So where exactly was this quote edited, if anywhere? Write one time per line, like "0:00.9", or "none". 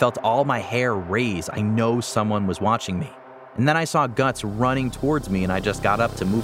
none